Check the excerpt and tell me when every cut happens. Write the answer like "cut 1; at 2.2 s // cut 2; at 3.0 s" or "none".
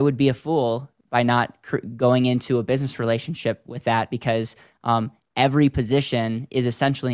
none